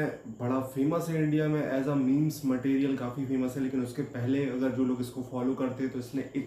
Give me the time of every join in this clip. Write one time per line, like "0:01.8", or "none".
none